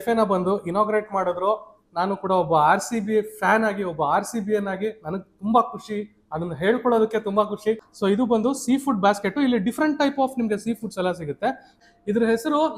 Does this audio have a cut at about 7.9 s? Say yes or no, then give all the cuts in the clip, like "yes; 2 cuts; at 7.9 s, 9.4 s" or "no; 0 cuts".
yes; 2 cuts; at 7.9 s, 11.7 s